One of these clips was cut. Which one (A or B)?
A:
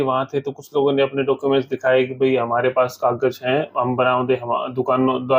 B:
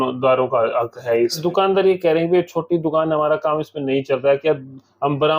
B